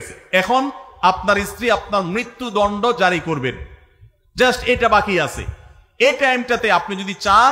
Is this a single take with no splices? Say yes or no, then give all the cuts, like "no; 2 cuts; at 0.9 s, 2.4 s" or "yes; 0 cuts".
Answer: yes; 0 cuts